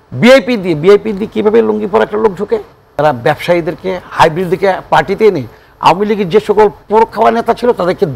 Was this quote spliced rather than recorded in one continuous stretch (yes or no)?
yes